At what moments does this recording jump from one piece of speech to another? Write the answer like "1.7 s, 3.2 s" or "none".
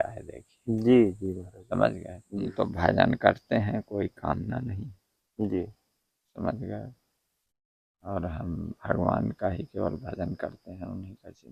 2.5 s